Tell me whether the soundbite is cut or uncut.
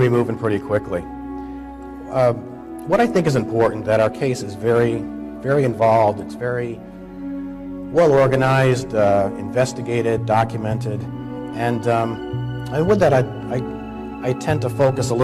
uncut